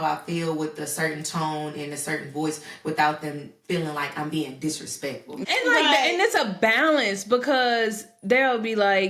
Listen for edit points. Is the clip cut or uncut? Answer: cut